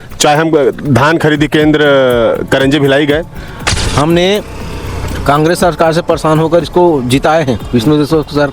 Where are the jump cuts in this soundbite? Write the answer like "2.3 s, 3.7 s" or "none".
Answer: 3.8 s